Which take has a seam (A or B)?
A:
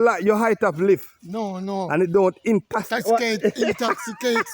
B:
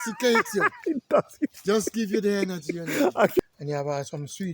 B